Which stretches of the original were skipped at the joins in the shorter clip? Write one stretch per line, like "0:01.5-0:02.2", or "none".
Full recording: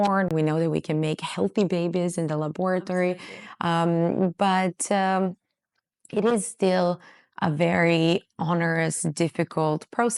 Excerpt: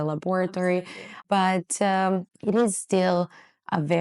0:03.6-0:04.3
0:05.4-0:06.0